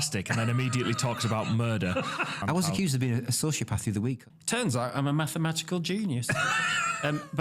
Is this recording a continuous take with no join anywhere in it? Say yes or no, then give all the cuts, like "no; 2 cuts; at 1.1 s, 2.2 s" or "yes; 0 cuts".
no; 2 cuts; at 2.4 s, 4.3 s